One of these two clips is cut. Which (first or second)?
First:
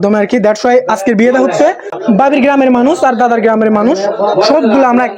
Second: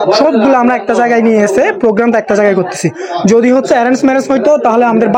first